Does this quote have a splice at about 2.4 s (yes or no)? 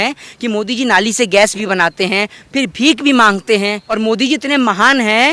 yes